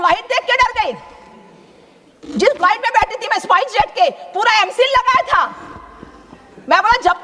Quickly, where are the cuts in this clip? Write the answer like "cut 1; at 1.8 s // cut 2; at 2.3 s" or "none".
none